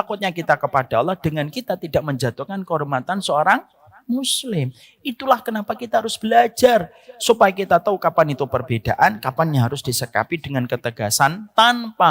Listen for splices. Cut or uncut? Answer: uncut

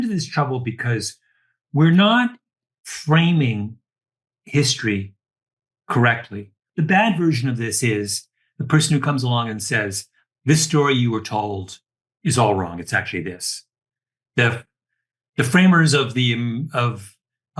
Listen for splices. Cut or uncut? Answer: cut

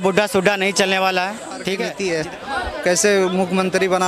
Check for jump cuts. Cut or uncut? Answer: cut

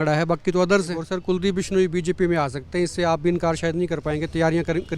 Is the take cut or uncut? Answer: cut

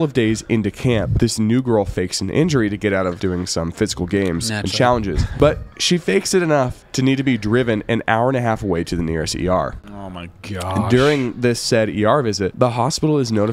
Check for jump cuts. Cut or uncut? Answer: cut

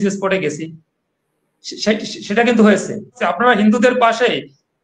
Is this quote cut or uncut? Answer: cut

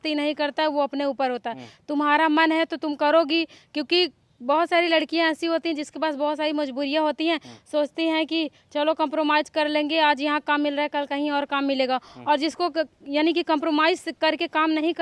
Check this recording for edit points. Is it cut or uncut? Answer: uncut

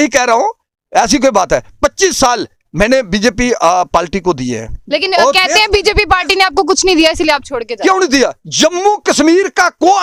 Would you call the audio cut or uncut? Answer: uncut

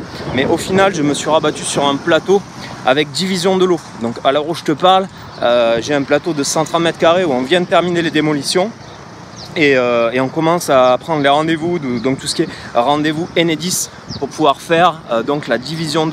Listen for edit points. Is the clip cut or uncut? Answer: uncut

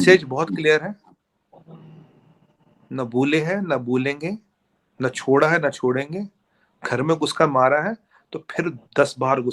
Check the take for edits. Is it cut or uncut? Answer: uncut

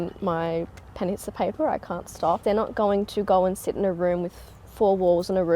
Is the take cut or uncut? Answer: cut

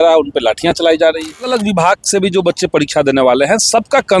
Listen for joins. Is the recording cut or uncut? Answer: cut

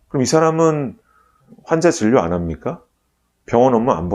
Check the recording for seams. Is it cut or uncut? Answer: cut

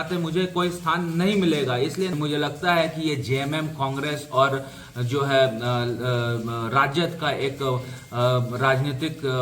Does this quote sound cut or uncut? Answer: cut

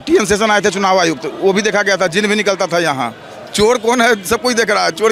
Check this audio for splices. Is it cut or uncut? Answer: uncut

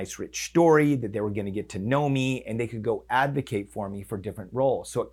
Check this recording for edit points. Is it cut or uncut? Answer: uncut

